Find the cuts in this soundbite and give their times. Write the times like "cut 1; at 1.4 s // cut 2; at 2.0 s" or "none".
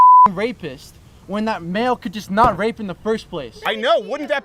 none